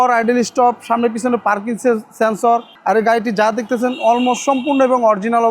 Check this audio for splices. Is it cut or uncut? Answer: cut